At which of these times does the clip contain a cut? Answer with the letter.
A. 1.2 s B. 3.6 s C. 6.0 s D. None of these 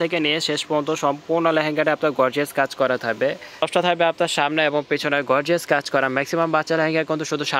B